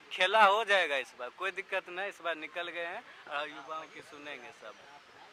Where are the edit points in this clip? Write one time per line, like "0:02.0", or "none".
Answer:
none